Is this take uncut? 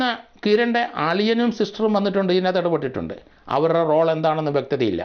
yes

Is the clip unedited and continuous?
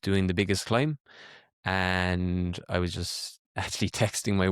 yes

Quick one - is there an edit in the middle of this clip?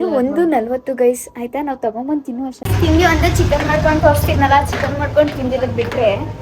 yes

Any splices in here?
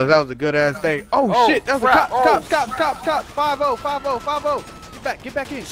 no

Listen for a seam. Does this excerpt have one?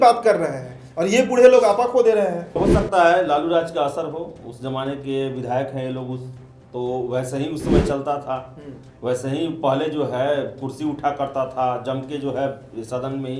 yes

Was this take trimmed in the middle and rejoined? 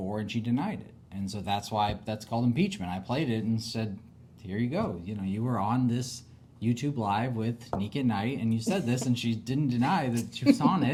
no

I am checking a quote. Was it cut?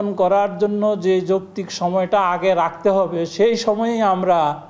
no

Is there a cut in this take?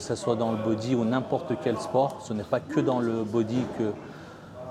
no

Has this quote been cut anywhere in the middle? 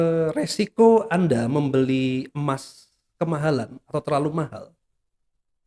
no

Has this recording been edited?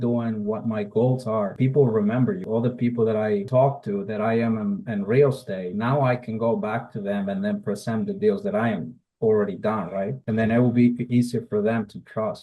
yes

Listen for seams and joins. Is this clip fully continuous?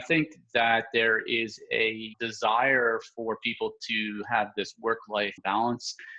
no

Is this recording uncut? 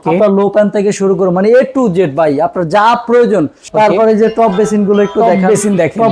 no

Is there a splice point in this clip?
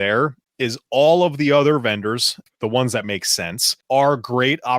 yes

